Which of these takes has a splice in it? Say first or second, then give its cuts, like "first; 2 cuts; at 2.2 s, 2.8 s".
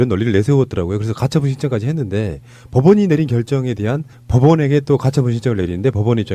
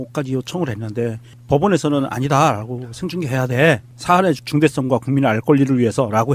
first; 1 cut; at 4.9 s